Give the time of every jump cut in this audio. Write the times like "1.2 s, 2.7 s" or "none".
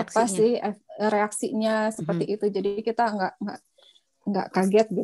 none